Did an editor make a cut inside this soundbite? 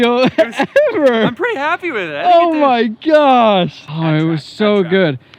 yes; 1 cut; at 3.8 s

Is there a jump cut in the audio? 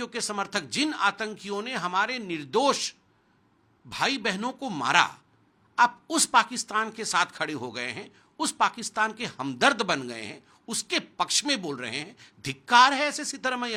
no; 0 cuts

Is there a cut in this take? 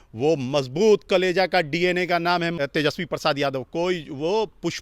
yes; 1 cut; at 2.5 s

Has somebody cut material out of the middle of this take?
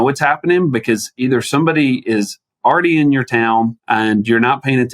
yes; 1 cut; at 3.8 s

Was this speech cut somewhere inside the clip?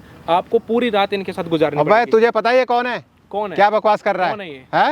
no; 0 cuts

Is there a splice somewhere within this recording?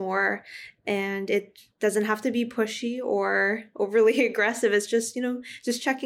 no; 0 cuts

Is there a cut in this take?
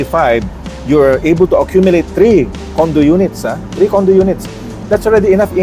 no; 0 cuts

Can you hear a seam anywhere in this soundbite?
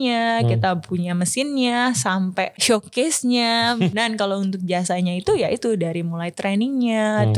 yes; 2 cuts; at 2.6 s, 3.9 s

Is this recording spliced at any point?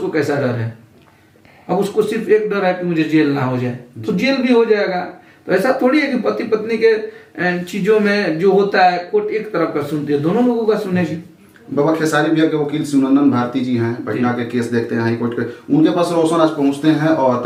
no; 0 cuts

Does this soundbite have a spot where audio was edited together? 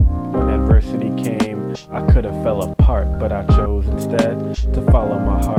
no; 0 cuts

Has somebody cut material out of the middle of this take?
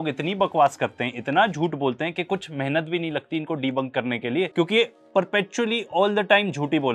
no; 0 cuts

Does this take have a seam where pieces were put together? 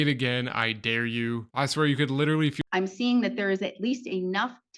yes; 1 cut; at 2.6 s

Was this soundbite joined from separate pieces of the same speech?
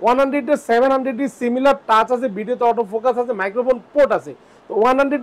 no; 0 cuts

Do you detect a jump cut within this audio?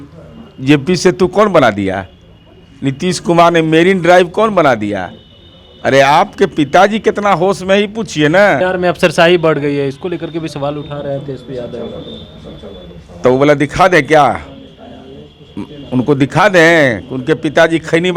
yes; 1 cut; at 8.6 s

